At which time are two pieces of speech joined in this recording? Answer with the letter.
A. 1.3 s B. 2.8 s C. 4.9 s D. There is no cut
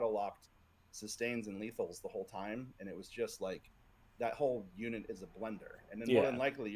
D